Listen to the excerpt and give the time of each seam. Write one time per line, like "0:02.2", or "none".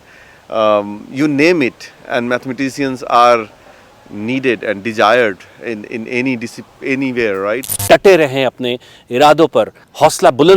0:07.7